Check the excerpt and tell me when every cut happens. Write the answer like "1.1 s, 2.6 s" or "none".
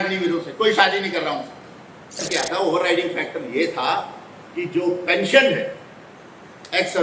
2.2 s